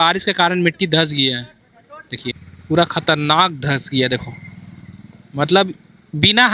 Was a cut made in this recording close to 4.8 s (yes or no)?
no